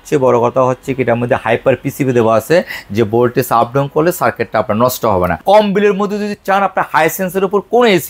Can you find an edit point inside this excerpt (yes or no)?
yes